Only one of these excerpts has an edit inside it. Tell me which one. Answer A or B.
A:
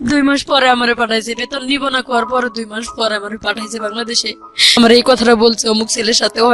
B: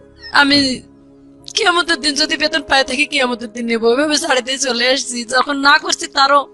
A